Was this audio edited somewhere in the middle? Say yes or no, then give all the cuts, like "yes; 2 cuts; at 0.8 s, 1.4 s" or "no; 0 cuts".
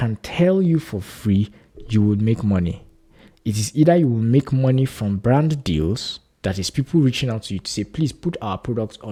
no; 0 cuts